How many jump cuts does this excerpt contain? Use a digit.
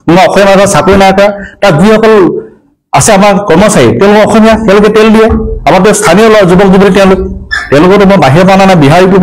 0